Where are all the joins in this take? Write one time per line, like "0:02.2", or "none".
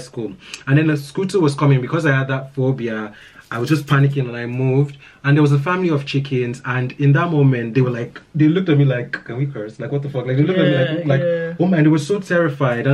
none